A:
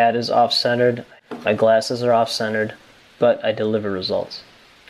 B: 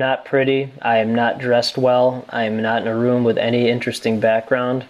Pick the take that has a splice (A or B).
A